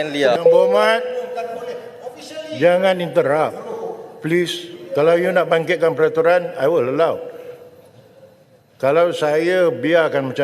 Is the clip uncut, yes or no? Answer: yes